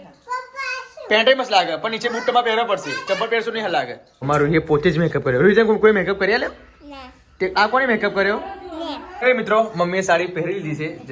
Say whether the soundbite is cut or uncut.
cut